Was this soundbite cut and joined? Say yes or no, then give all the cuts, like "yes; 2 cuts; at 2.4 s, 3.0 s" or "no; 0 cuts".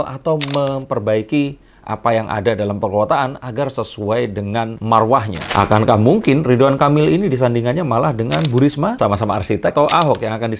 yes; 1 cut; at 5.4 s